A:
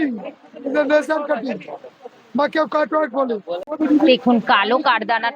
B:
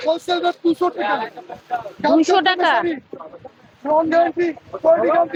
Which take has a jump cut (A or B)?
A